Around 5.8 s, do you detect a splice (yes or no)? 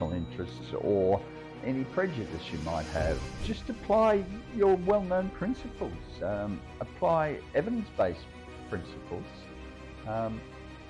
no